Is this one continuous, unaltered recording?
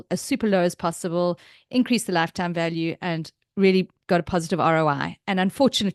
yes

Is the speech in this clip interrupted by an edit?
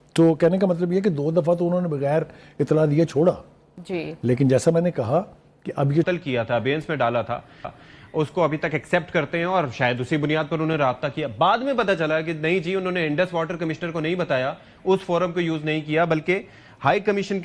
yes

